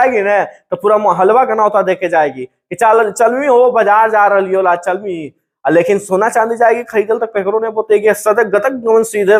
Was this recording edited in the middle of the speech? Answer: no; 0 cuts

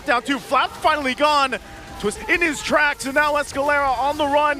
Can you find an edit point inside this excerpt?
yes; 1 cut; at 2.2 s

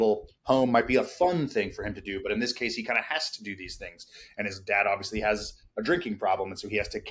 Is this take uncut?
yes; 0 cuts

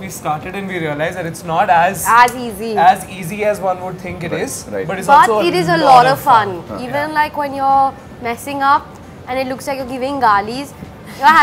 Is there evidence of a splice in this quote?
no; 0 cuts

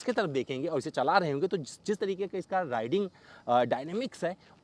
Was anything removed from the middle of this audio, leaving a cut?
no; 0 cuts

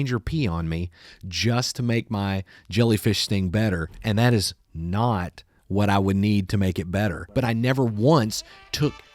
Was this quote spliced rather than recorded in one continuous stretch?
yes; 1 cut; at 7.4 s

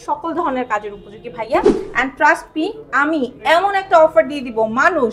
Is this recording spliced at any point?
yes; 1 cut; at 1.8 s

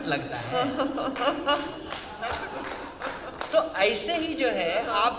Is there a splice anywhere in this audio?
no; 0 cuts

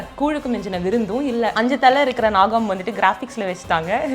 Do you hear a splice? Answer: yes; 1 cut; at 1.5 s

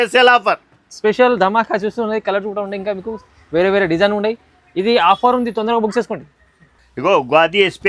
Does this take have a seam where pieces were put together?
no; 0 cuts

